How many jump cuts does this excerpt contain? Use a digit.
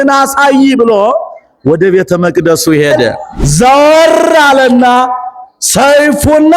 1